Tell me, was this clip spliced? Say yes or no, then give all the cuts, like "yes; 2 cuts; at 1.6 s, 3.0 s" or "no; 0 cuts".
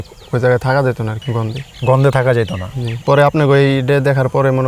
no; 0 cuts